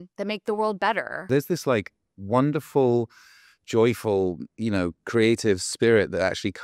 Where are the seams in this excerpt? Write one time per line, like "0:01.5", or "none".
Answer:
0:01.3